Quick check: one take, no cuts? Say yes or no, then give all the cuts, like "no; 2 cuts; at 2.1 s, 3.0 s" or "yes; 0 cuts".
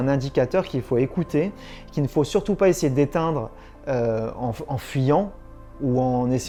yes; 0 cuts